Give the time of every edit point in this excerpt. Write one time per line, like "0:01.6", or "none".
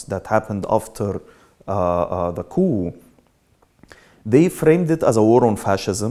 none